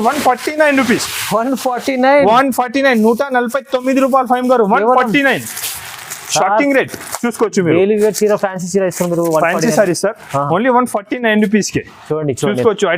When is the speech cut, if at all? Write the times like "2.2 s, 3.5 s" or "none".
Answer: none